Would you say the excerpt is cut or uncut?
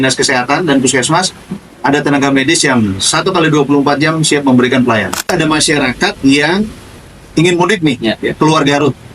cut